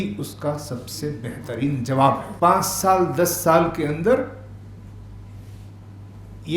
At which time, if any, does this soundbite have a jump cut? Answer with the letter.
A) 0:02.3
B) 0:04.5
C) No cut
A